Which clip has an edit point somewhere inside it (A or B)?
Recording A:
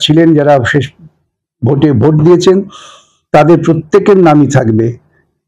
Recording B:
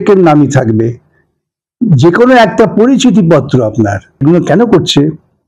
B